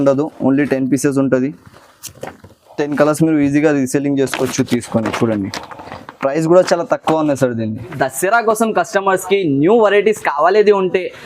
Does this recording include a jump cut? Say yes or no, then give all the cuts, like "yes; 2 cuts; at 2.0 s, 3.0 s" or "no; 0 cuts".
yes; 1 cut; at 8.0 s